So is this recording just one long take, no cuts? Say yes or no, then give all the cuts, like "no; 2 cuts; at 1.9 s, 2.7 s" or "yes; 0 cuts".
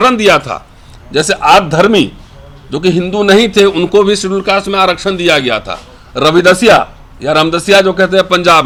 yes; 0 cuts